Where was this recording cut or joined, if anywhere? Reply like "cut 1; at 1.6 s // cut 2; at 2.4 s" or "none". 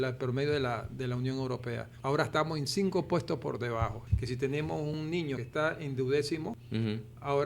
cut 1; at 1.9 s // cut 2; at 4.0 s // cut 3; at 5.1 s // cut 4; at 6.6 s